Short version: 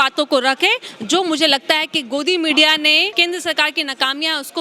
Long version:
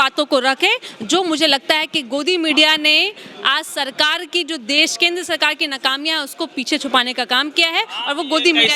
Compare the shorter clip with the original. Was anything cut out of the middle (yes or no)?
yes